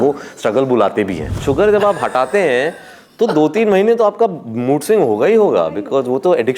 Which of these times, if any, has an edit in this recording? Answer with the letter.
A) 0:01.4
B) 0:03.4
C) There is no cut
A